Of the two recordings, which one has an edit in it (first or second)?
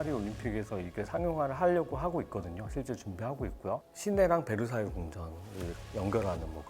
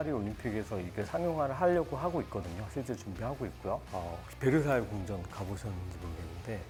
first